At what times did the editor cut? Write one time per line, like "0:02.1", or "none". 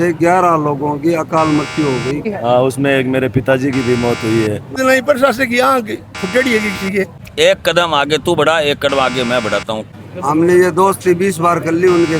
0:02.3
0:04.7
0:07.2
0:09.8